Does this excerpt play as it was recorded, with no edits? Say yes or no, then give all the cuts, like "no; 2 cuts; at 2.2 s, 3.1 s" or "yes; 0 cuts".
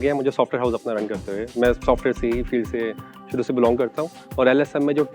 yes; 0 cuts